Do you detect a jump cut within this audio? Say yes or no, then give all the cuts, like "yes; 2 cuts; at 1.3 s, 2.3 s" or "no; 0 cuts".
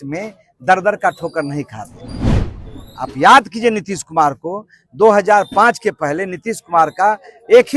no; 0 cuts